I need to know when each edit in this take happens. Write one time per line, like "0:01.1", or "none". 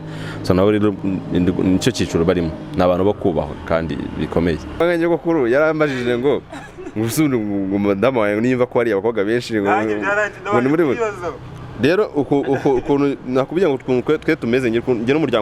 0:04.8